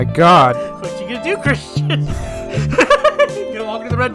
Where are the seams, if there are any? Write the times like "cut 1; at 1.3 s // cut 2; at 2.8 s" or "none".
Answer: none